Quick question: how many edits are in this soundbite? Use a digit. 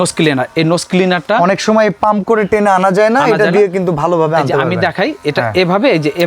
0